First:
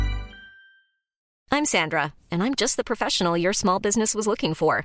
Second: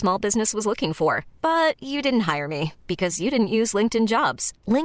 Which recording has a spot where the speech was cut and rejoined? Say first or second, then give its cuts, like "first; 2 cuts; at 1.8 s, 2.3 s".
first; 1 cut; at 1.3 s